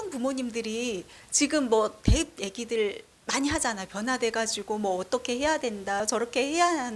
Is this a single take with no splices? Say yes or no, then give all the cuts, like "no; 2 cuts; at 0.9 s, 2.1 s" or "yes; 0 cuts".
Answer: yes; 0 cuts